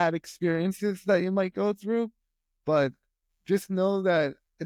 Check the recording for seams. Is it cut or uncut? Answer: uncut